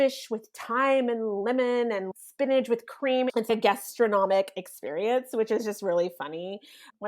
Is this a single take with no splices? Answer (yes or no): no